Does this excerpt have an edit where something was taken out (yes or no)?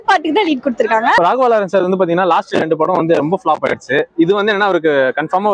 yes